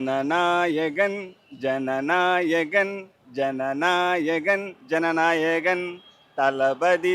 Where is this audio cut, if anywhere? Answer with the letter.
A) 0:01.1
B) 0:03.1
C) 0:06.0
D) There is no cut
D